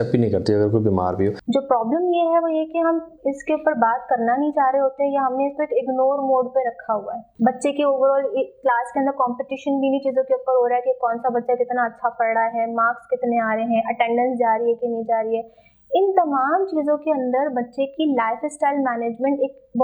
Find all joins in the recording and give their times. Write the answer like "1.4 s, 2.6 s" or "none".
1.4 s, 7.2 s